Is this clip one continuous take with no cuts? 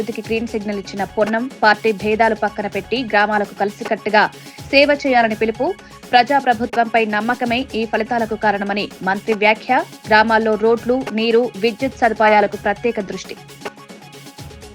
yes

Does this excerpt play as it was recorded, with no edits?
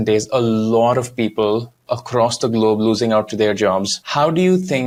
yes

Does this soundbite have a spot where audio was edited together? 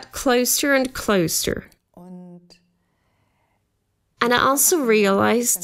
yes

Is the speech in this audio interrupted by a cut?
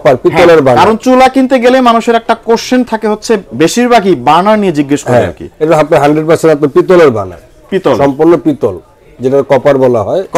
no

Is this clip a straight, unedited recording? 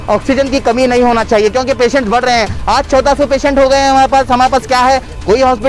yes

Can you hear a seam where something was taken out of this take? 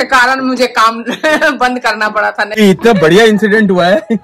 yes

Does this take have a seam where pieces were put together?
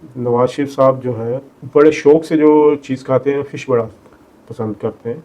yes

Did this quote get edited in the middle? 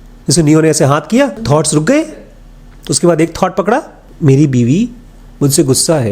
yes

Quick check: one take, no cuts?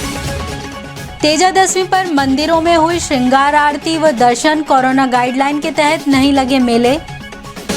yes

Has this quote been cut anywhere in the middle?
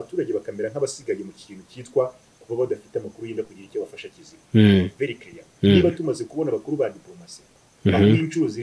no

